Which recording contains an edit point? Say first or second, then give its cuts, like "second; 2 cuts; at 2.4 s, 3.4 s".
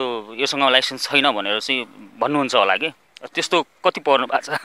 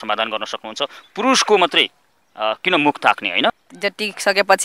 second; 1 cut; at 3.7 s